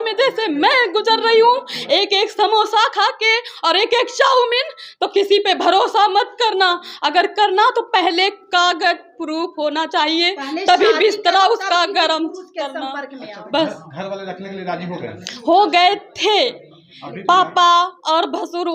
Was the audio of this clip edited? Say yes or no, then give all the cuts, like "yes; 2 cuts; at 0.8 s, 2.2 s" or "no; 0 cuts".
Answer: no; 0 cuts